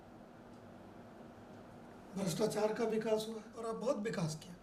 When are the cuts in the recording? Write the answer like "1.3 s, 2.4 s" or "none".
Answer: 3.5 s